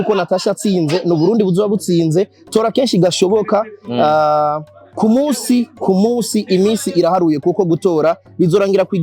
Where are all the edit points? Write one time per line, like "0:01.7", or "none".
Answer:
none